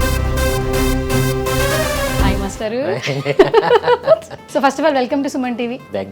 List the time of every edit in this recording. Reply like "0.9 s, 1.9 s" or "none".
4.4 s